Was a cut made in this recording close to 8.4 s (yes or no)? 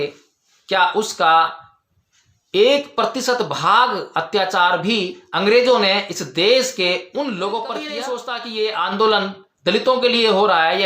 yes